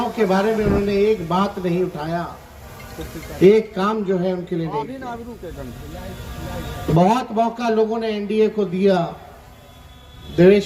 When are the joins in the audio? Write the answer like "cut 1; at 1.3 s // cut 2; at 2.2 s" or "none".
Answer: none